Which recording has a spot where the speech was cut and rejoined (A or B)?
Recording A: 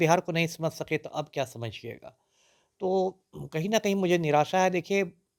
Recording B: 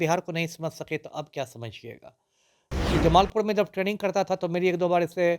B